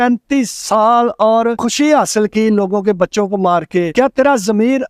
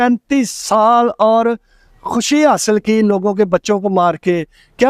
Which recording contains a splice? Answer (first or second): first